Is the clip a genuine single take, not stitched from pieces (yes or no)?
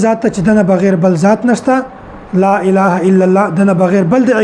yes